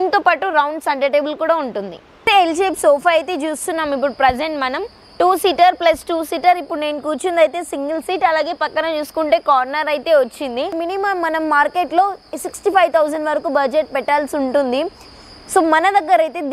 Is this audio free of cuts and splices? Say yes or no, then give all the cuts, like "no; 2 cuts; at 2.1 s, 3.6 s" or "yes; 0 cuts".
no; 2 cuts; at 2.2 s, 10.7 s